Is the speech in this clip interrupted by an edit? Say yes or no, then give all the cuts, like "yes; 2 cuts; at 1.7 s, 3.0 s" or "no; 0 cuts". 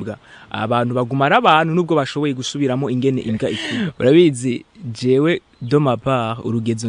yes; 1 cut; at 3.6 s